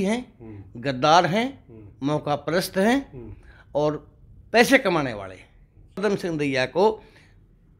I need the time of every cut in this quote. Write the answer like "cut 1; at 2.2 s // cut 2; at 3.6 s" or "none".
cut 1; at 6.0 s

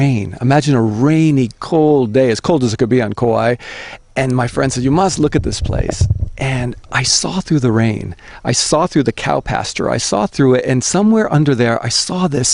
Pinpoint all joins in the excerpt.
cut 1; at 5.2 s

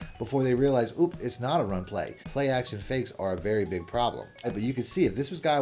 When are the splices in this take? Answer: cut 1; at 2.2 s // cut 2; at 4.5 s

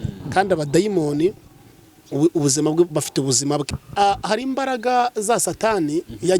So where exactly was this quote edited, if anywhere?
cut 1; at 3.8 s

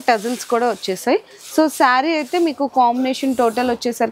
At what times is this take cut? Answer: none

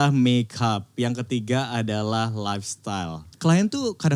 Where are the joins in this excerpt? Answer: cut 1; at 3.2 s

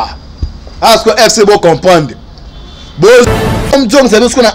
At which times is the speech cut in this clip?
cut 1; at 3.3 s

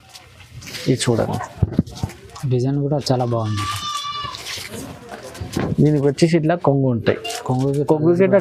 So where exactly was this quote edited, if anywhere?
none

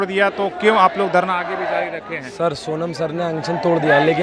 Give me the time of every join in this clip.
none

